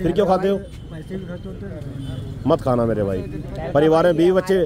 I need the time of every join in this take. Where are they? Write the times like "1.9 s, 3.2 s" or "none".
none

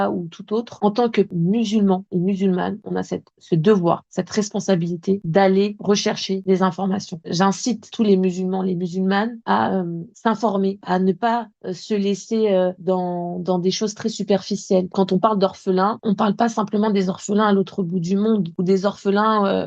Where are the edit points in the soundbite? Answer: 7.2 s

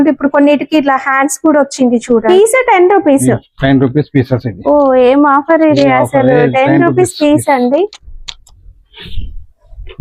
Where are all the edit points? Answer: 2.2 s

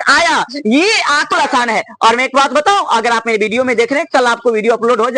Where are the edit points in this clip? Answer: 1.3 s

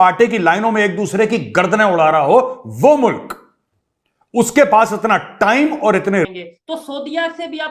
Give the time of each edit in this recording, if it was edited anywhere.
6.3 s

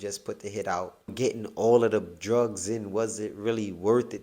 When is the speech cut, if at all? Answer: 1.1 s

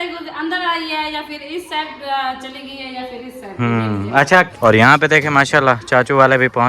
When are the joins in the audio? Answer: 4.5 s

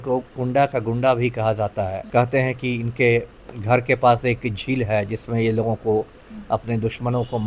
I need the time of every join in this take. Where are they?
2.0 s

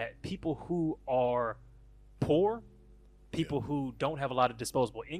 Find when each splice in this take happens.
none

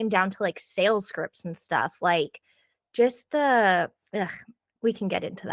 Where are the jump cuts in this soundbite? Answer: none

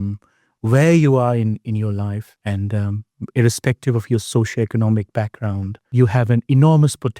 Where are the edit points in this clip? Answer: 2.3 s, 5.8 s

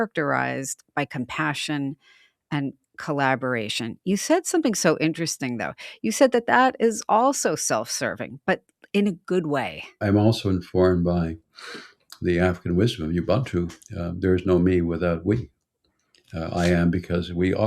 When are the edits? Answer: 10.0 s

